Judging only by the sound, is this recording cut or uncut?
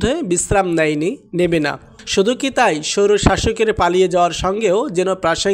uncut